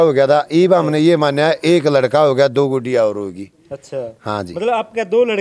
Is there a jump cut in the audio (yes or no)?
no